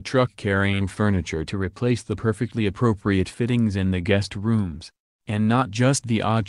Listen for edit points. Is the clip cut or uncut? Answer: uncut